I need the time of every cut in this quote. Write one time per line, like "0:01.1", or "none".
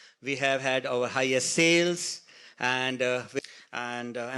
0:03.3

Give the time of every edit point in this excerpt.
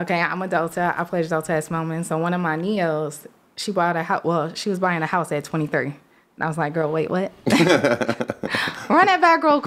none

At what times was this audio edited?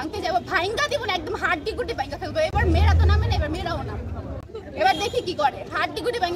none

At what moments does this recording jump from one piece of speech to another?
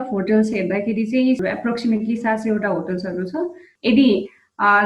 0:03.7

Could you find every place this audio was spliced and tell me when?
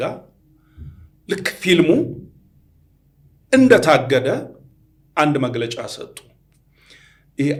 none

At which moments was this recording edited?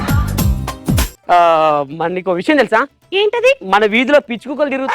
0:01.1

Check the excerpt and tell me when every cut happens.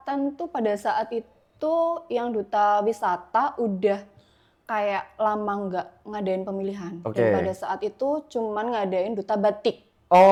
none

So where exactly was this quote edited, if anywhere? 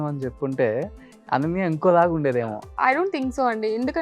0:02.6

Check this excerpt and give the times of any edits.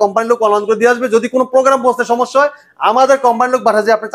none

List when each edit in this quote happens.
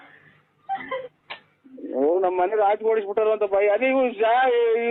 none

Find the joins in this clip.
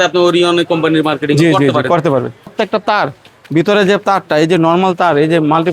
0:02.5

